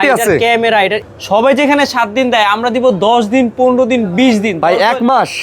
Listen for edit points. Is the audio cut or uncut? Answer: cut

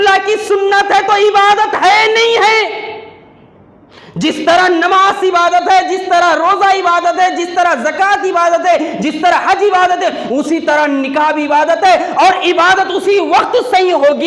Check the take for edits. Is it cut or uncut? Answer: uncut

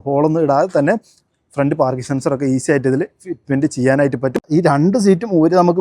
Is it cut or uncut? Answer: cut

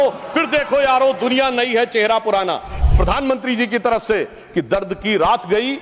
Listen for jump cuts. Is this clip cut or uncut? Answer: cut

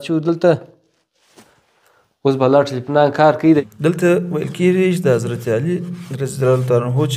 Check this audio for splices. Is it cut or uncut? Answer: cut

